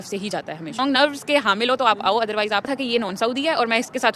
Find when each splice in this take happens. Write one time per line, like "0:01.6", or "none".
0:00.8
0:02.7